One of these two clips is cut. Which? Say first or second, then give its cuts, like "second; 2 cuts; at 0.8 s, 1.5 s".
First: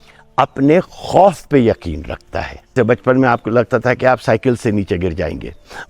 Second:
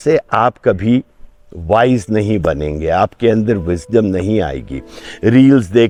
first; 1 cut; at 2.7 s